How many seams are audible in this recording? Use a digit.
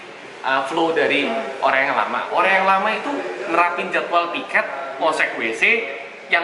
0